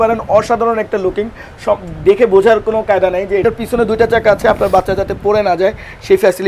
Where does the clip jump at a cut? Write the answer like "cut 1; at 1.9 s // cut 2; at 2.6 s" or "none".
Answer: cut 1; at 3.4 s